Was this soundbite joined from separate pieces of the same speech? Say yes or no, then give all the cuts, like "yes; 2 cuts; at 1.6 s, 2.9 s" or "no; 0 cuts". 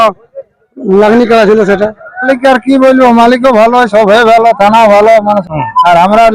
yes; 2 cuts; at 2.3 s, 5.4 s